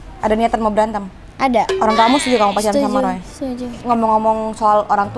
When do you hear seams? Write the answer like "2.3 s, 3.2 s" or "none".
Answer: none